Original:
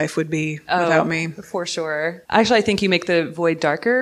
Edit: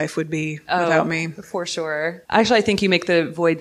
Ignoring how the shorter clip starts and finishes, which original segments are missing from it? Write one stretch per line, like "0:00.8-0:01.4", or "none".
none